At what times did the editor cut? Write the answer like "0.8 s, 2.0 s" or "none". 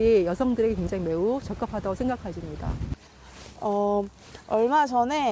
2.9 s